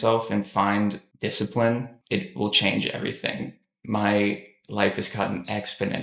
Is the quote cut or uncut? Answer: uncut